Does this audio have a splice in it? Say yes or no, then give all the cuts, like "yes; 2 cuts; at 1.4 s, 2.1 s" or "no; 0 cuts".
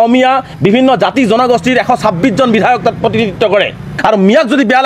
yes; 1 cut; at 3.9 s